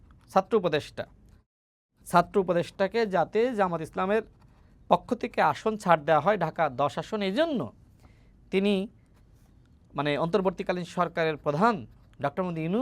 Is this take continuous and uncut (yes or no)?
yes